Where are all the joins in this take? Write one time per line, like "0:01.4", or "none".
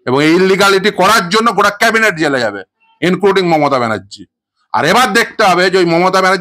none